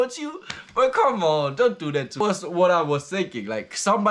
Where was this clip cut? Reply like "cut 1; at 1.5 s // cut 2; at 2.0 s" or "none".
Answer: cut 1; at 2.2 s